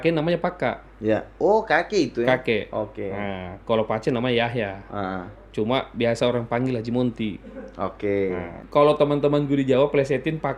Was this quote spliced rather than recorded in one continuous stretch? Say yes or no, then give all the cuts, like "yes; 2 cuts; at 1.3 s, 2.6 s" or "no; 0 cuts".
yes; 1 cut; at 8.6 s